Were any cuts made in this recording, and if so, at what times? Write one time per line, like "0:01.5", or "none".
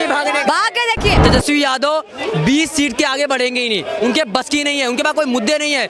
0:01.2